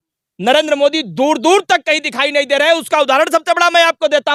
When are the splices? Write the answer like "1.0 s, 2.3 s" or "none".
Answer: none